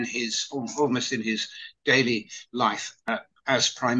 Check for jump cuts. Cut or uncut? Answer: cut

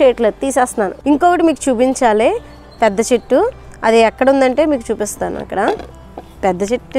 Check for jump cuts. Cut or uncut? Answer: cut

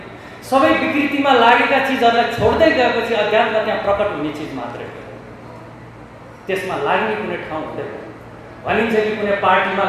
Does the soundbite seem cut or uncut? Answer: uncut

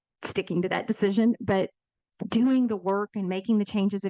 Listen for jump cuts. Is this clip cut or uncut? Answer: uncut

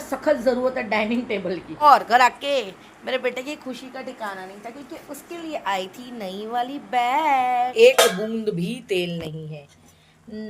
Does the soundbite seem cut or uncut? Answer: cut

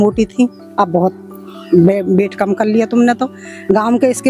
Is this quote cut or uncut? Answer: uncut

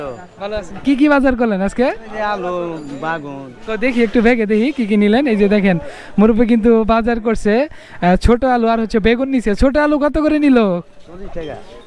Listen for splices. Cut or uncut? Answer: uncut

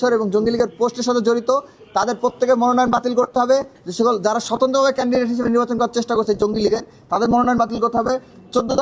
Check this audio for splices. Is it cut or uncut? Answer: uncut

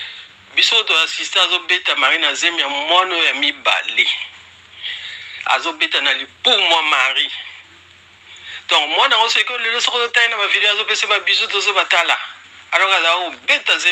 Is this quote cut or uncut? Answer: uncut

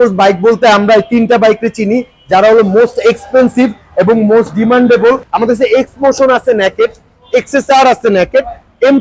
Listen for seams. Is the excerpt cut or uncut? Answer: cut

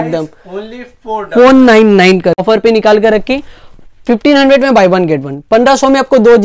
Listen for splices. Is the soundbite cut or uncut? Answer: cut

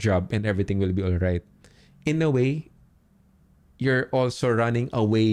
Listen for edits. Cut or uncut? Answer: uncut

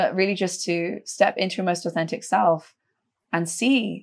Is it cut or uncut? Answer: uncut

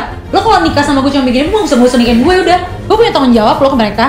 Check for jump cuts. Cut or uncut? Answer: cut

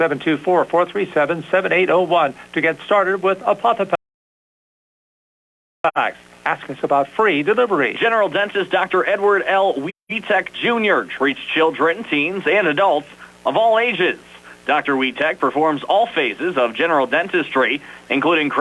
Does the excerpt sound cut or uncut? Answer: uncut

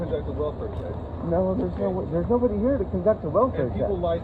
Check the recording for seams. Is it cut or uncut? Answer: uncut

